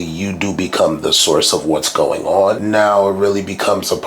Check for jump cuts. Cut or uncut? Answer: cut